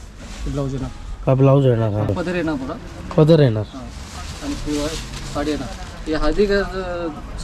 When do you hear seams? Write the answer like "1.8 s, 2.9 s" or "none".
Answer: 2.1 s